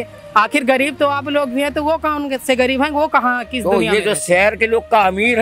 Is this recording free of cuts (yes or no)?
yes